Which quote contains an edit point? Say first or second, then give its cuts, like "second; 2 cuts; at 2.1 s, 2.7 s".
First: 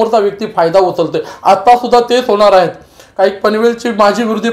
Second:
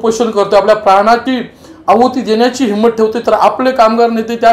second; 1 cut; at 1.2 s